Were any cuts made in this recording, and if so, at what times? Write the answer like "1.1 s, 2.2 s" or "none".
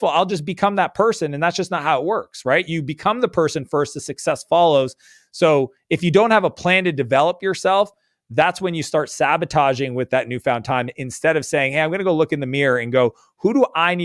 none